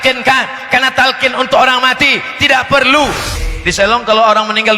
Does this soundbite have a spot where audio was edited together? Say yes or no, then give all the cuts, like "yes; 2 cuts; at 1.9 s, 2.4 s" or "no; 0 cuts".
yes; 1 cut; at 3.3 s